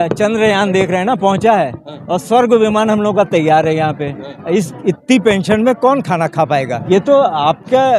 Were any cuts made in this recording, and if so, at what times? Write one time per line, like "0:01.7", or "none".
0:06.8